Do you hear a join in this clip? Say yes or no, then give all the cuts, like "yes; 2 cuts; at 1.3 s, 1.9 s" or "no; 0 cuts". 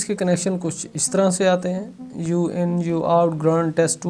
no; 0 cuts